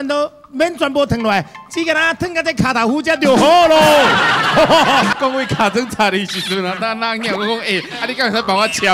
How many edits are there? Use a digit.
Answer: 1